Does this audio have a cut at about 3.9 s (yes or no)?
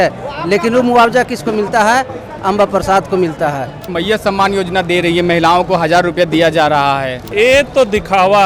yes